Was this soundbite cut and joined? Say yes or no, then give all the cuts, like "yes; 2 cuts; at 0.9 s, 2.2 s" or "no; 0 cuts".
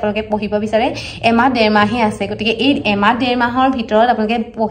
no; 0 cuts